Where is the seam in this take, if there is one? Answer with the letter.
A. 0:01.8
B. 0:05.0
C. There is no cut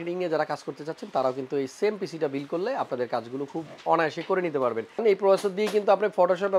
B